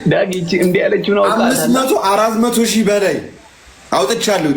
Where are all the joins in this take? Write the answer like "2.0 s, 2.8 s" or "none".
none